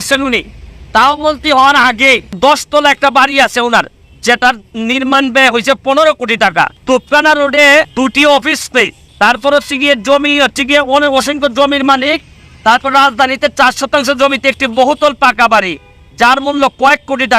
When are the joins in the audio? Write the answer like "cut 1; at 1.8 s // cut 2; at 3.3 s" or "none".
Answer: cut 1; at 2.4 s // cut 2; at 6.8 s // cut 3; at 7.9 s // cut 4; at 9.0 s

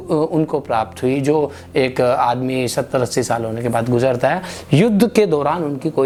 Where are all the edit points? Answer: none

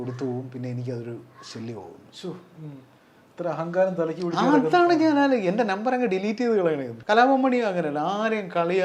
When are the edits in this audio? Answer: cut 1; at 6.9 s

